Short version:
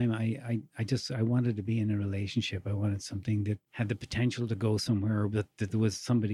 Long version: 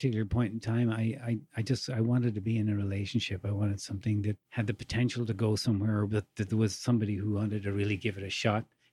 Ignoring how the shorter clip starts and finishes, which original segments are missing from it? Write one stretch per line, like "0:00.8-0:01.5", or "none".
none